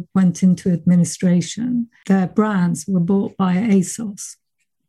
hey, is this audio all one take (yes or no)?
no